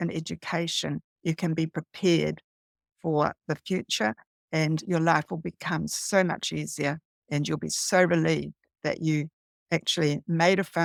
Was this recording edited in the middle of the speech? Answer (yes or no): no